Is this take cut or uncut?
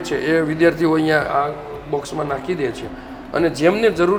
uncut